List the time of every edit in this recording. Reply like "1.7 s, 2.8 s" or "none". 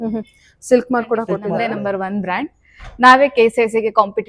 1.6 s